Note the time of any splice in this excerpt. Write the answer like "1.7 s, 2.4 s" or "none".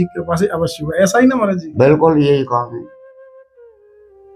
2.9 s